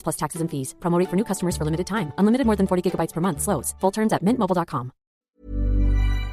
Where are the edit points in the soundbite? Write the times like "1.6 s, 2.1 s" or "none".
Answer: 5.2 s